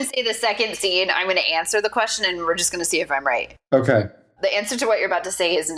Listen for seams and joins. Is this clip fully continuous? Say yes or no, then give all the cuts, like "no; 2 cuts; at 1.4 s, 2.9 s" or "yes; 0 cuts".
yes; 0 cuts